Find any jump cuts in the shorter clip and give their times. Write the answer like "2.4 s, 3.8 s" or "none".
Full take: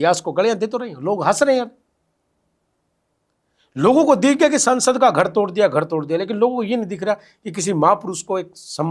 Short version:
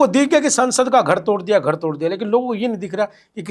none